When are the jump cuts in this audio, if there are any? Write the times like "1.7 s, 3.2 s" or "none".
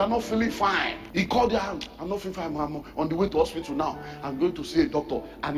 1.0 s